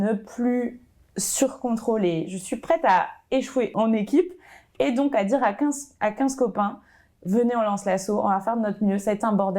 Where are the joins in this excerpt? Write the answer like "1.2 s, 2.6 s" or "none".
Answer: 3.7 s